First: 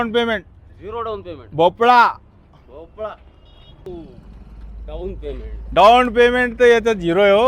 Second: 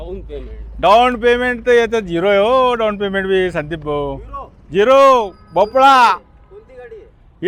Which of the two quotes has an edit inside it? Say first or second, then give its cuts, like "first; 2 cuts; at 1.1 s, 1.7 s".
first; 1 cut; at 3.9 s